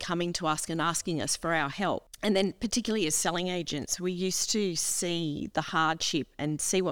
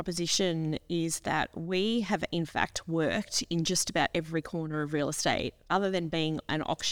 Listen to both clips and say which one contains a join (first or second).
first